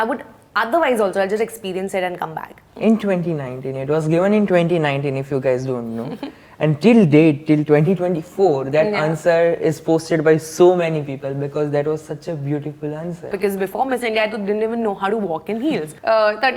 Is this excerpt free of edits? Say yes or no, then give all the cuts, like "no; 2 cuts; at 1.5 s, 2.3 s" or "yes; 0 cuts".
no; 2 cuts; at 2.6 s, 13.3 s